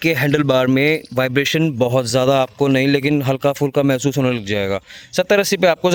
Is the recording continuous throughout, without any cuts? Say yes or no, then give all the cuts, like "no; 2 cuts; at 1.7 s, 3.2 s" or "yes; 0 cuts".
yes; 0 cuts